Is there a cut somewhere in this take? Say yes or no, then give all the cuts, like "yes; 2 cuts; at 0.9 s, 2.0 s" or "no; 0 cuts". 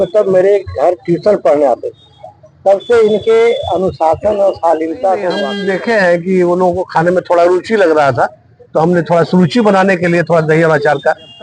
yes; 1 cut; at 5.5 s